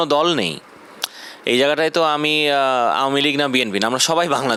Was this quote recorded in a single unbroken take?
yes; 0 cuts

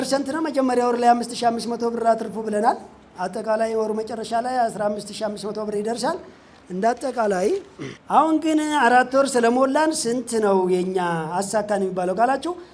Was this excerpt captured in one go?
yes; 0 cuts

